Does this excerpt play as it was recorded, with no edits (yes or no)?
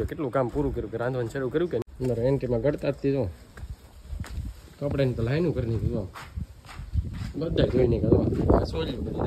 no